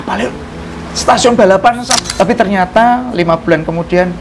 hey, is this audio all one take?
no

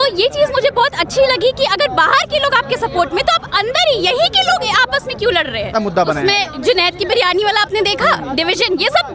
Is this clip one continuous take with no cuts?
no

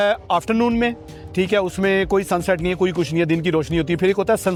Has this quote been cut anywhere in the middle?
no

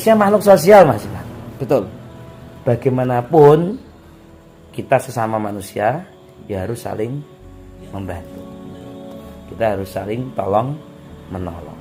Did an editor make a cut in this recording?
no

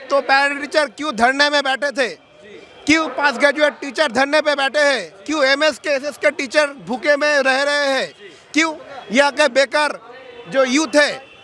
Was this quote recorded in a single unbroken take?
yes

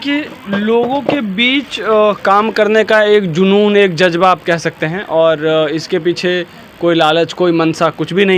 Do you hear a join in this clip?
no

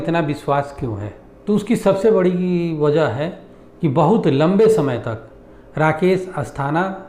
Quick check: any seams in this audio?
no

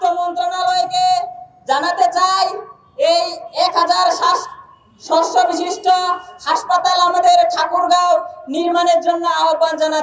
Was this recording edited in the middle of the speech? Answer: no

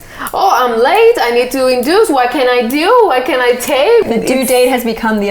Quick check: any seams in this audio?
yes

